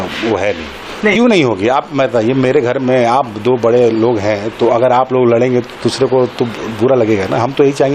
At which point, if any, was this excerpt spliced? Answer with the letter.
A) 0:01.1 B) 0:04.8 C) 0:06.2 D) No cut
A